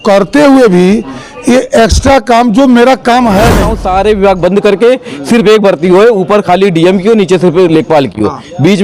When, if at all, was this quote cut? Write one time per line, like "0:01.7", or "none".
0:03.7